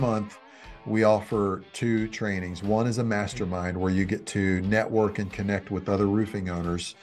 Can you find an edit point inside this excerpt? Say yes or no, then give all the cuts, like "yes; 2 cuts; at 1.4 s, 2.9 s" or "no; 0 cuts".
no; 0 cuts